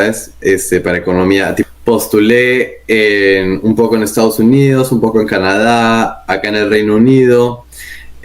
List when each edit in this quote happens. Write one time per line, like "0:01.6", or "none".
0:01.7